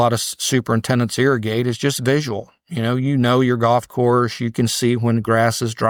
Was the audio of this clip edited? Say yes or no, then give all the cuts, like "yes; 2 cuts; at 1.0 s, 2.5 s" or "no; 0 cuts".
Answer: no; 0 cuts